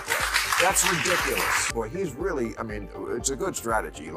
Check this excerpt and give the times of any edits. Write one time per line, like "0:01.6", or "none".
0:01.7